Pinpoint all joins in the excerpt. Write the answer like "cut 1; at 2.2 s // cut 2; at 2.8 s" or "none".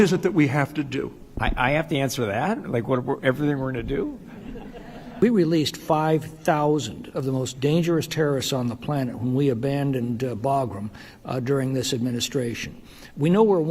cut 1; at 1.2 s // cut 2; at 5.2 s